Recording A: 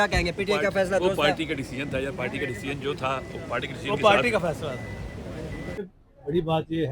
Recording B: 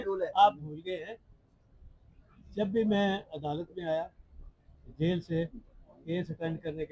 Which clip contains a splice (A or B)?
A